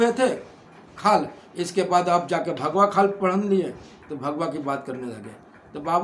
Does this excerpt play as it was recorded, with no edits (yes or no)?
yes